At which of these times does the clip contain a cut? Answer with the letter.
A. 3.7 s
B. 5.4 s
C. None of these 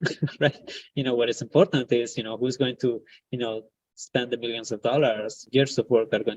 B